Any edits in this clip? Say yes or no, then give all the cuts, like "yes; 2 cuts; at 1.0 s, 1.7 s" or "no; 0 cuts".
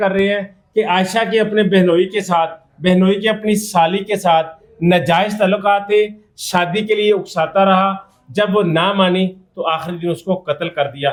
no; 0 cuts